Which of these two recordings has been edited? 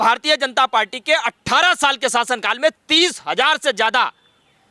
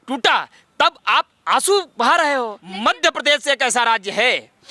second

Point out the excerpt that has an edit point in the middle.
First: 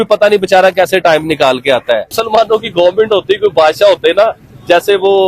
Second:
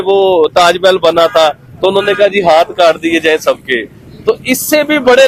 first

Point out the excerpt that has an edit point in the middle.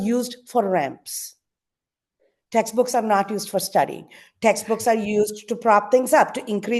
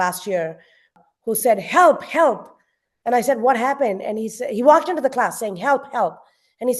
second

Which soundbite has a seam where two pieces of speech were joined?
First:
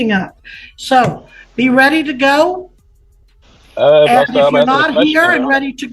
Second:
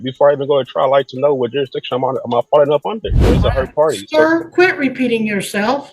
second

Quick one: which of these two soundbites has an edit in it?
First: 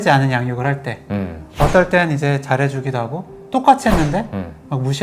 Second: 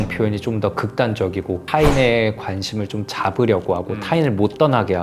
second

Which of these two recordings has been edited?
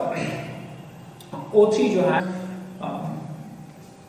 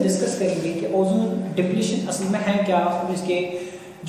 first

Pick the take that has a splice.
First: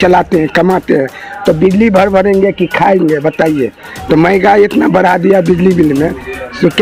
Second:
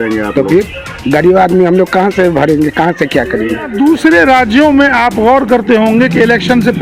second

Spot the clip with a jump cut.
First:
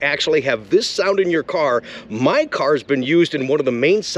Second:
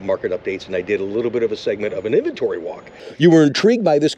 second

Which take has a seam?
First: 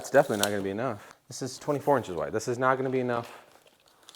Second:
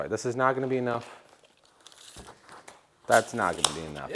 first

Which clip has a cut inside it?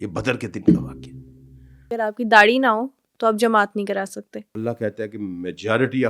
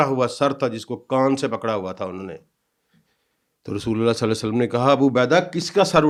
first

